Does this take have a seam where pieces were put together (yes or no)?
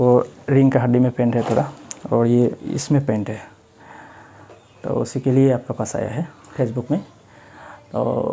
yes